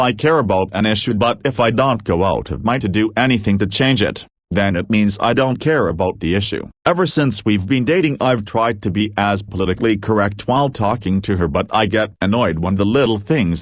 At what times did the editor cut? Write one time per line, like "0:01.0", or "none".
0:06.6

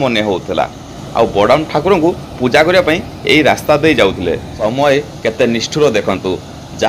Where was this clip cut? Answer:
0:01.0
0:04.5

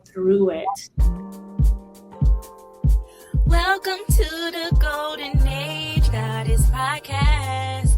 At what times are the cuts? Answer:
0:01.0

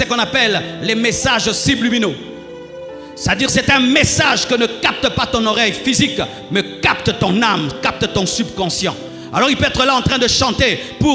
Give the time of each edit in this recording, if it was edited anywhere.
none

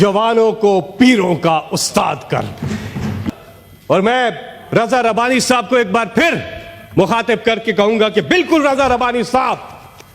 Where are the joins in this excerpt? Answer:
0:03.2

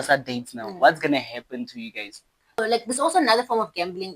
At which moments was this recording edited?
0:02.6

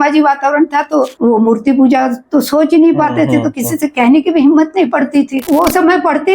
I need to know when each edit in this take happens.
0:05.4

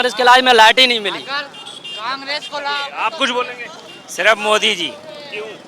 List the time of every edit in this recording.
none

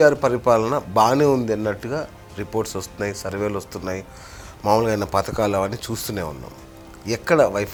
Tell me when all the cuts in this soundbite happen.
none

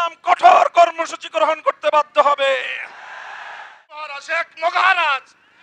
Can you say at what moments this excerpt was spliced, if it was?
0:04.1

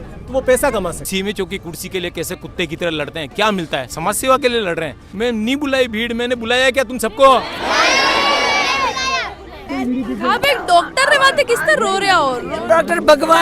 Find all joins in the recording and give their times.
0:01.0
0:05.0
0:09.7

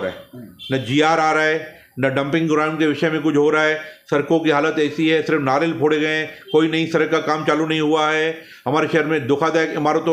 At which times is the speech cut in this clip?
none

